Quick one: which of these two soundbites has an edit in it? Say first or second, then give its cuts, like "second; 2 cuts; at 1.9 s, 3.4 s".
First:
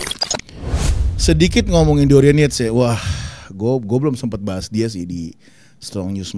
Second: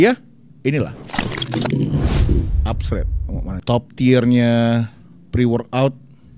second; 1 cut; at 3.6 s